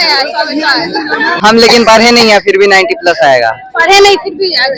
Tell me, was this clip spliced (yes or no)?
yes